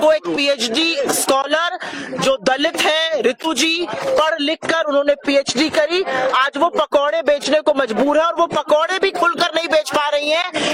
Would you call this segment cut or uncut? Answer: uncut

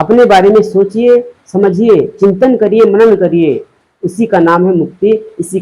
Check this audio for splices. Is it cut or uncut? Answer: uncut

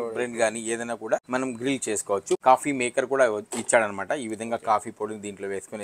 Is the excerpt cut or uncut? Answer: cut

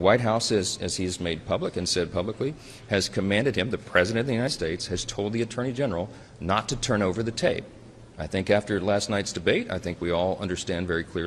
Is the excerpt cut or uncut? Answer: uncut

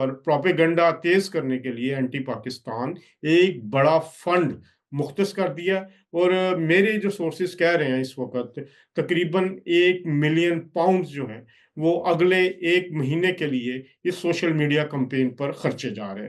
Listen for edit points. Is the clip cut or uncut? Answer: uncut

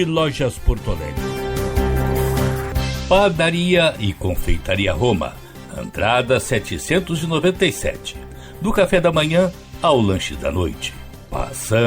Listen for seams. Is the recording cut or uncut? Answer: cut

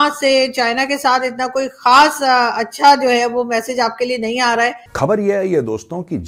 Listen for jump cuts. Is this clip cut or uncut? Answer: cut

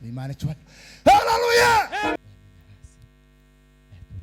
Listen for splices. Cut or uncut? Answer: cut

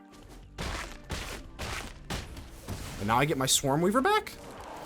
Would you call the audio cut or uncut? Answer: cut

